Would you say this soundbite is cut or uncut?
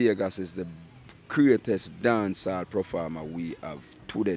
uncut